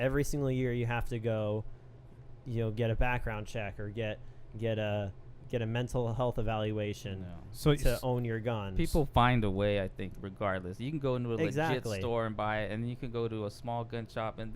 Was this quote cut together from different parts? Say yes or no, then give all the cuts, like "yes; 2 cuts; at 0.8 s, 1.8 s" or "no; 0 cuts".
no; 0 cuts